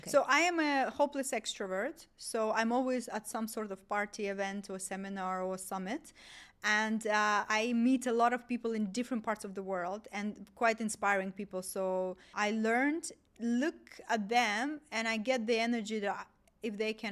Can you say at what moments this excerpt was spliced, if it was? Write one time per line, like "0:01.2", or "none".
0:12.3
0:13.2